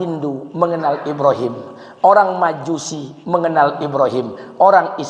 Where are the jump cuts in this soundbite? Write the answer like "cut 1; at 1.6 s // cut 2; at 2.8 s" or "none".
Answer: none